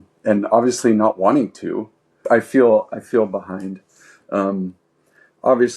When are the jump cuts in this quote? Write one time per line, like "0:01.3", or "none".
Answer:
0:02.2